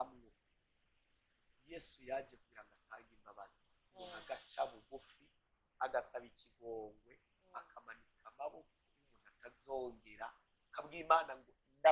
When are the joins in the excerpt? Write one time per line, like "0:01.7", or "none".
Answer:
none